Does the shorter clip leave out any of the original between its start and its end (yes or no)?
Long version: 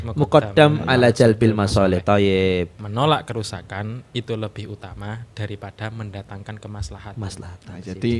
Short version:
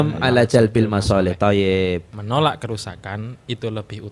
no